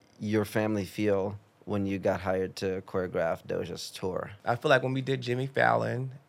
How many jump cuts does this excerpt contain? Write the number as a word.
one